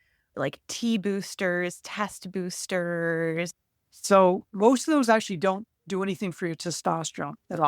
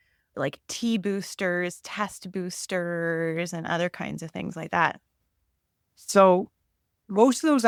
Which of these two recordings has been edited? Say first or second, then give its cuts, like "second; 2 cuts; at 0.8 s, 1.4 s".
first; 2 cuts; at 3.5 s, 4.5 s